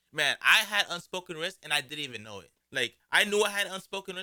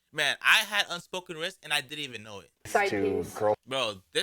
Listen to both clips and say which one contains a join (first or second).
second